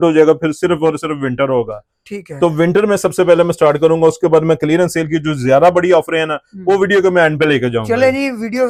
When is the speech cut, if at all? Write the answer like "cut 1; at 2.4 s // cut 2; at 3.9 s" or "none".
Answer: none

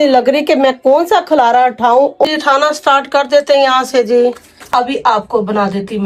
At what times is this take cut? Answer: cut 1; at 2.2 s // cut 2; at 4.7 s

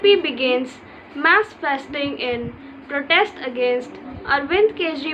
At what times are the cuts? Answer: none

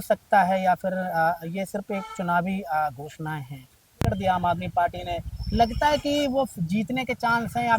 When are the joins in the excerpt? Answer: cut 1; at 4.1 s

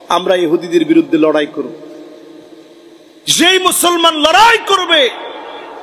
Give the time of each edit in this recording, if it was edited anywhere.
none

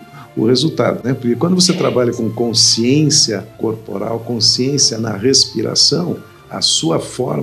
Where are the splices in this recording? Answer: cut 1; at 1.0 s

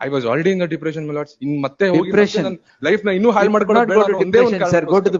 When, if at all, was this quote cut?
none

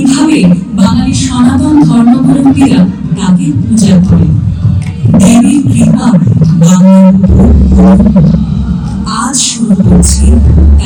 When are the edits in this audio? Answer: none

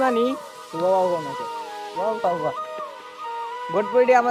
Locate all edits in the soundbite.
none

